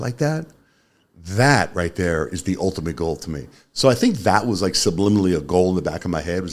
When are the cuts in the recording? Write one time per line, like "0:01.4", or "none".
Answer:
none